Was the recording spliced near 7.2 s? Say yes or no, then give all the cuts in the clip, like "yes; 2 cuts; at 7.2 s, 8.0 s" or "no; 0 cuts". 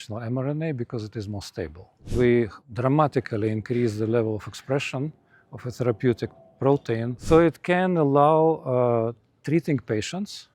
yes; 3 cuts; at 2.1 s, 2.6 s, 7.2 s